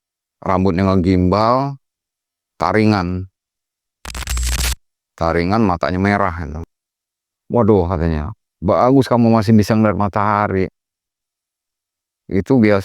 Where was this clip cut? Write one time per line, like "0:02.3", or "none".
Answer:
0:06.5